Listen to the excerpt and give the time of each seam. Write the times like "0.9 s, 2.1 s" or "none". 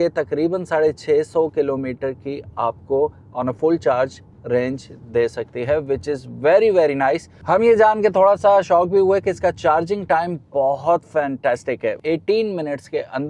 7.3 s, 12.0 s